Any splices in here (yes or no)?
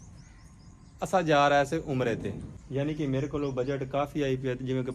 yes